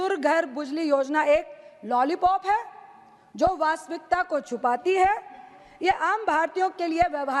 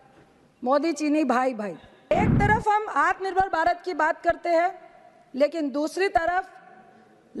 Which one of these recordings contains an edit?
second; 1 cut; at 2.1 s

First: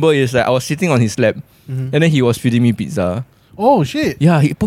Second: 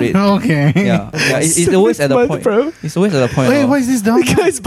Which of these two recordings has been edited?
second; 1 cut; at 1.1 s

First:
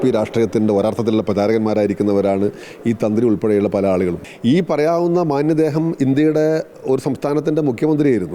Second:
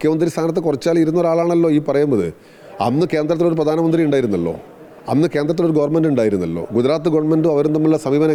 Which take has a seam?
first; 1 cut; at 4.2 s

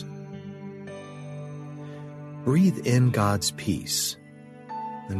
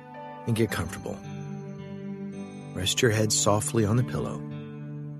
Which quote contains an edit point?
second; 3 cuts; at 1.1 s, 2.7 s, 4.3 s

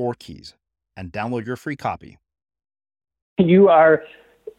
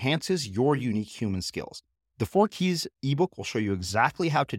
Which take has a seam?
first; 1 cut; at 3.4 s

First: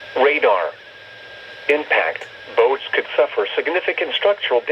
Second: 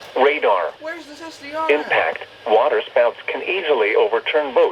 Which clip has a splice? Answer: first; 1 cut; at 2.3 s

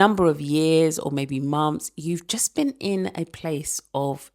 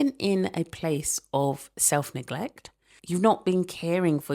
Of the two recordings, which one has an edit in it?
second; 1 cut; at 2.9 s

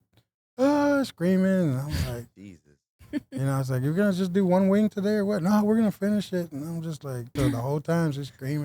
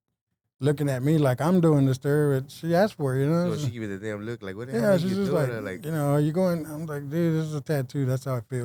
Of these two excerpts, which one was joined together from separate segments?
first; 1 cut; at 7.3 s

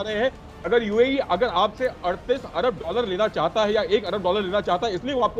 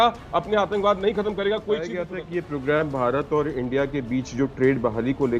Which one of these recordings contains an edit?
second; 1 cut; at 2.0 s

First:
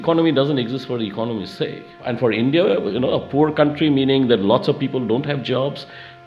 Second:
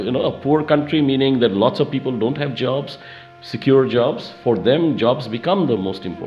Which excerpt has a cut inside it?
first; 1 cut; at 1.9 s

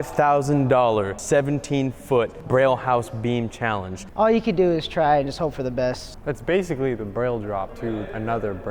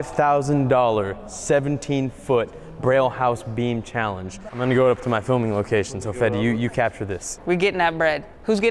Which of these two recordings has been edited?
first; 5 cuts; at 1.2 s, 2.4 s, 4.0 s, 6.0 s, 7.9 s

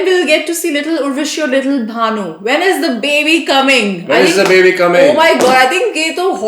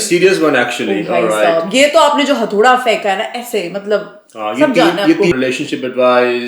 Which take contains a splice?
second; 1 cut; at 5.3 s

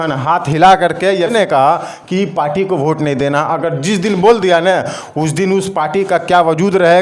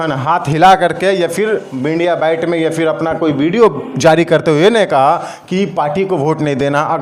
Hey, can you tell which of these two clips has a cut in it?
first; 1 cut; at 1.3 s

